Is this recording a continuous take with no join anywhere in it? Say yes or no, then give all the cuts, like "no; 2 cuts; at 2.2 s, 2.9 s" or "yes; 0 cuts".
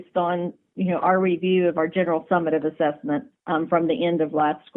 no; 1 cut; at 3.3 s